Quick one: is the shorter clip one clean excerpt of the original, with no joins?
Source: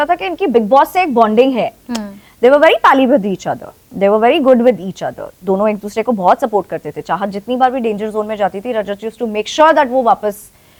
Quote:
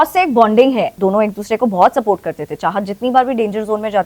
no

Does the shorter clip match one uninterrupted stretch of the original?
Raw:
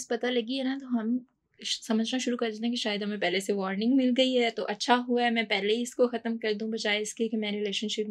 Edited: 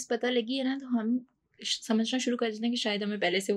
yes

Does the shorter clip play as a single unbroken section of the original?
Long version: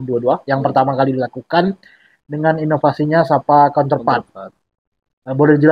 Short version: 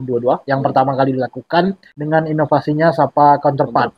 no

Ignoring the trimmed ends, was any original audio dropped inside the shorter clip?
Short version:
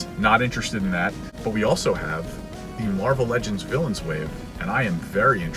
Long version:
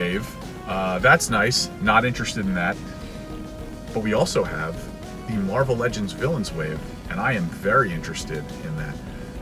yes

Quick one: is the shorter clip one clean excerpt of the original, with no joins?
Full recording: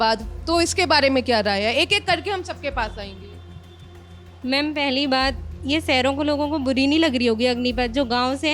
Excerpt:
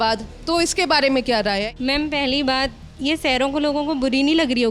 no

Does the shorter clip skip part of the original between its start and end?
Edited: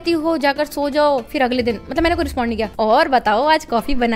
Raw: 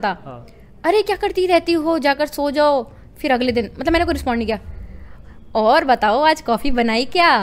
yes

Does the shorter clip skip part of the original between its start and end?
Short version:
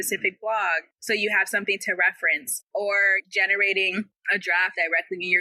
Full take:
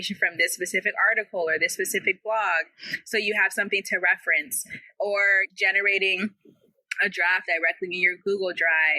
yes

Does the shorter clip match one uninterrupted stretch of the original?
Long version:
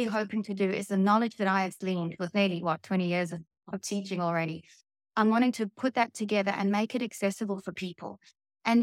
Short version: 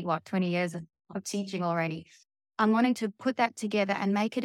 yes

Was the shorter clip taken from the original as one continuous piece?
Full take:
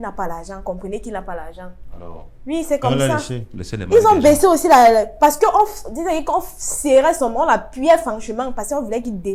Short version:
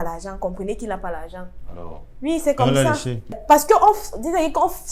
no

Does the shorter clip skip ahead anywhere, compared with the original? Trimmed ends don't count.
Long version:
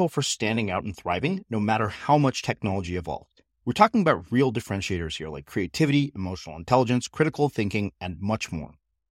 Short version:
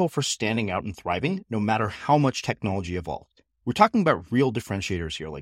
no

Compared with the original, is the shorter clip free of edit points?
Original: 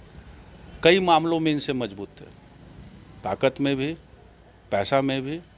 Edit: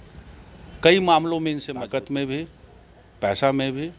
no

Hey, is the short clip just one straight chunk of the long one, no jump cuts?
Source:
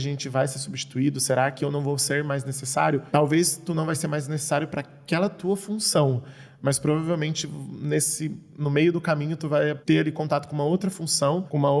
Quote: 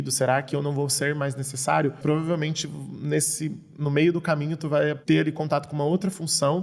no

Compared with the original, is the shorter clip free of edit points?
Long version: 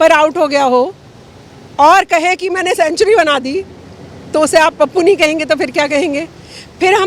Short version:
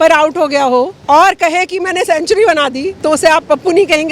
no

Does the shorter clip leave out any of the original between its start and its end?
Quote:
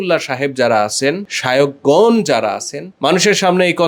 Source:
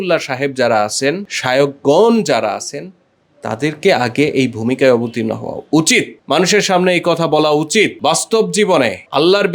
yes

